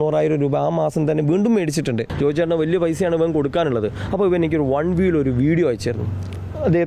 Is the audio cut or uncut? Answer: cut